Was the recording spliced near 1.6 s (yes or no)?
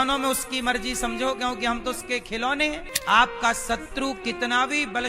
no